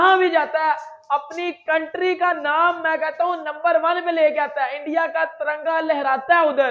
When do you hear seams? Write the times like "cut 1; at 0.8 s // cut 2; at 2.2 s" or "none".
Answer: none